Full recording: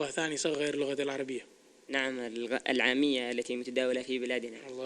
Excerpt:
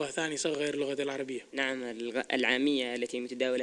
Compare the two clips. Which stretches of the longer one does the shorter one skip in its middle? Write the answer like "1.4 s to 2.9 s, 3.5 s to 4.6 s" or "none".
1.5 s to 1.8 s